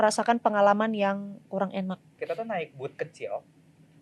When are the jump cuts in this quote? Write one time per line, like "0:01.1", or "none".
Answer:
0:02.1